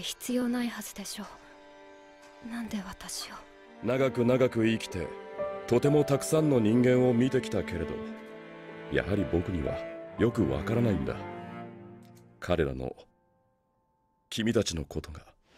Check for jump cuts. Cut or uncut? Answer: cut